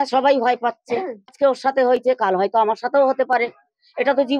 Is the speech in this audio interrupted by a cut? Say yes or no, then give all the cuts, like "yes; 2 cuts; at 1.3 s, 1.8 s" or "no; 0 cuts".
no; 0 cuts